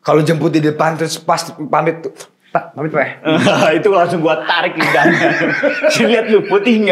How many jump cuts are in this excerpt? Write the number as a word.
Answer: zero